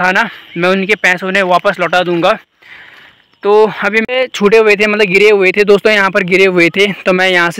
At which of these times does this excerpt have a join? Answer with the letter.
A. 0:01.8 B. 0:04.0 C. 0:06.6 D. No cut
B